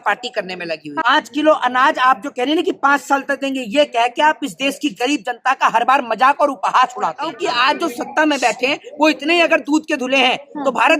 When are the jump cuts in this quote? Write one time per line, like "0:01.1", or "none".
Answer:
0:01.1
0:07.3

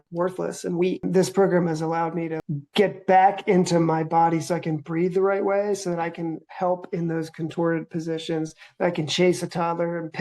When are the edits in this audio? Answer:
0:01.1
0:02.4

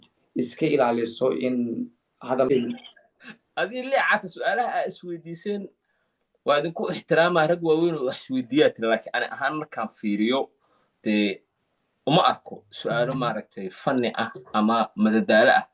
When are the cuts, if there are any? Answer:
0:02.5

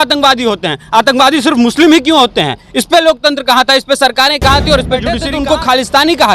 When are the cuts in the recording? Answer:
0:05.2

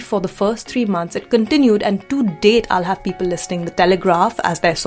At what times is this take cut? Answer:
none

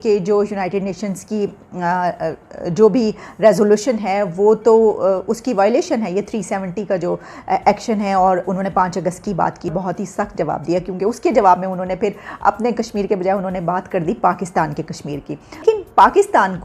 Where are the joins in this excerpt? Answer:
0:09.7
0:15.6

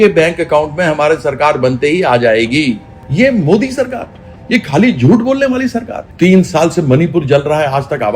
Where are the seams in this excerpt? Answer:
0:03.0
0:06.0

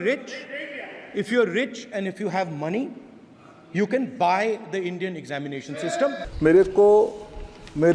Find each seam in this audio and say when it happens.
0:06.2

